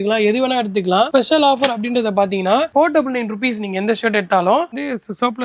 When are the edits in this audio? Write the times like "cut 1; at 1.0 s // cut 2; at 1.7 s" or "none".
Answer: cut 1; at 1.1 s // cut 2; at 2.7 s // cut 3; at 4.7 s